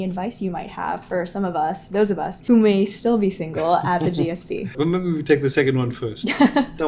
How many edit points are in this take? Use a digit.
2